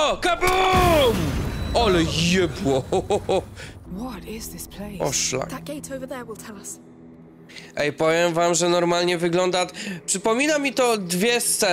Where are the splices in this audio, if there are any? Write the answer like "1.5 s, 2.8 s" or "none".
3.8 s